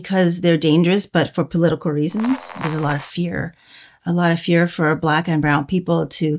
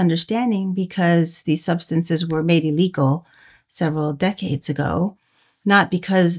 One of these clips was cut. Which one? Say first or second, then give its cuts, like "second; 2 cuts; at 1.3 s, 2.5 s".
first; 1 cut; at 2.7 s